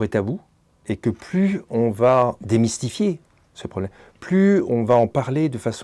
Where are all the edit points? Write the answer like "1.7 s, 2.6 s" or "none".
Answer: 2.4 s